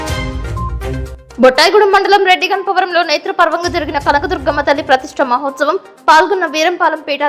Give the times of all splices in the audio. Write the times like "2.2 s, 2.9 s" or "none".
1.1 s